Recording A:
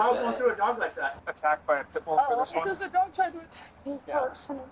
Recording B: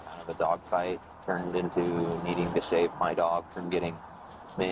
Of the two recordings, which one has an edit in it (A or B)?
A